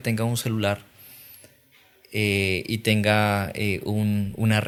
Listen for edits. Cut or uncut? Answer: uncut